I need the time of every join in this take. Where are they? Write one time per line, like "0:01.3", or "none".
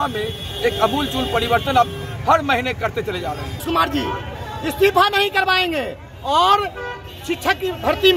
0:03.6